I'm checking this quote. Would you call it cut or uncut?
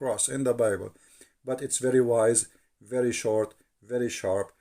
uncut